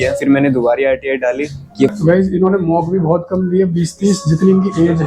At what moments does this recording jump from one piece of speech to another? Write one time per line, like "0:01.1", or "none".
0:01.9